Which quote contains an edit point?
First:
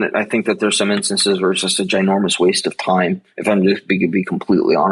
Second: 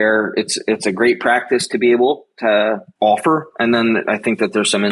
second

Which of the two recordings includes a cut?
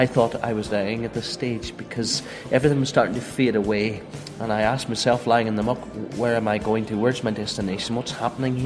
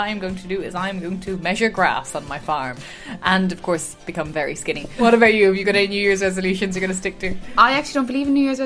second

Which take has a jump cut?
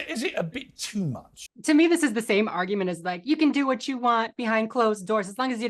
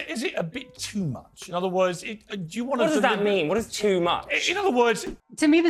first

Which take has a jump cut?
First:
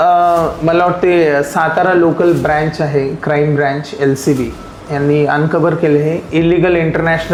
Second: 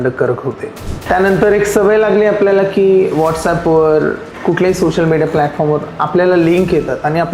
second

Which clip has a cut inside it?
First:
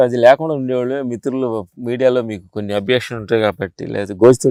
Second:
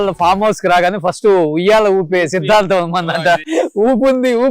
second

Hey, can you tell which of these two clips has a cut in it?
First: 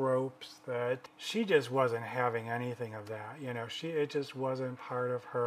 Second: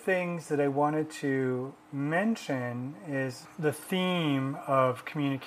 first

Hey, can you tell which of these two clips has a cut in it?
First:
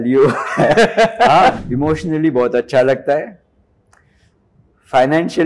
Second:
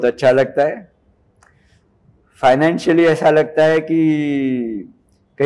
first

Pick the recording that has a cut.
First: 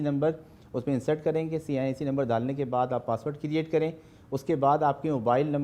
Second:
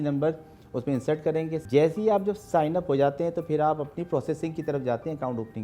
second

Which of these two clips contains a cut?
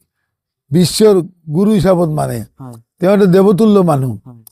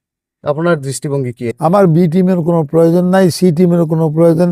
second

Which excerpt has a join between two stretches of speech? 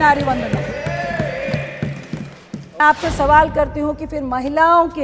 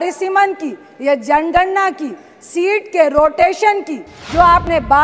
first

